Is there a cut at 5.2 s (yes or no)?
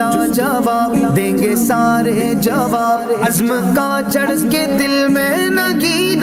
no